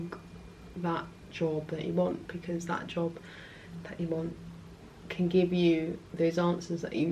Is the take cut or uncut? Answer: uncut